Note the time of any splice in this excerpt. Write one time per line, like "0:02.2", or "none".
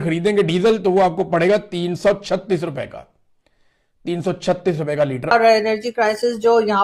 0:05.3

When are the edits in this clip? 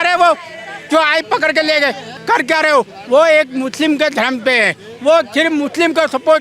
0:02.1

